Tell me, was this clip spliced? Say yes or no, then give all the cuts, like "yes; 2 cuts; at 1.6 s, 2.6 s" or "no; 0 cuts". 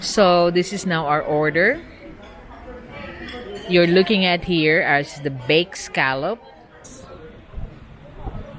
yes; 1 cut; at 6.9 s